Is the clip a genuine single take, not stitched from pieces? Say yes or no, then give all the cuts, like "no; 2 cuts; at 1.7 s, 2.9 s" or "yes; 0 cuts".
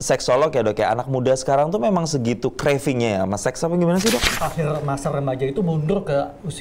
no; 1 cut; at 4.4 s